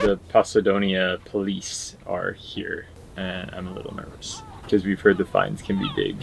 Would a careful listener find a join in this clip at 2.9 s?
yes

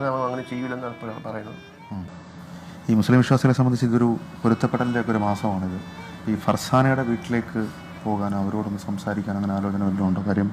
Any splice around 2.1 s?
yes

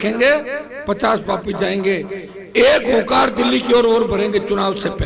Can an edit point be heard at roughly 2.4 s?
no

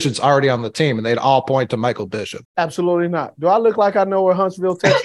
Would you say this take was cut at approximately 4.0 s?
no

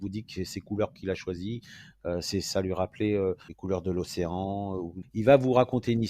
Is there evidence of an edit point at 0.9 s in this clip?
no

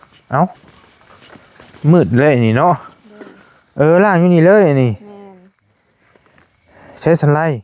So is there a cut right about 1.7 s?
no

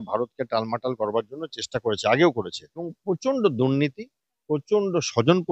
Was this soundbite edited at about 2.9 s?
yes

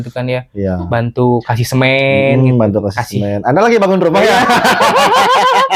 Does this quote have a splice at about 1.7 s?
no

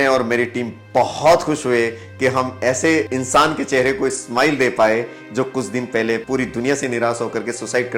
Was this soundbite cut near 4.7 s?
no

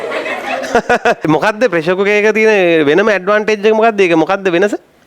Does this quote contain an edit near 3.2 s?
no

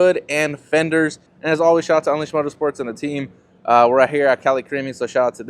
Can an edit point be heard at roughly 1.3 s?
yes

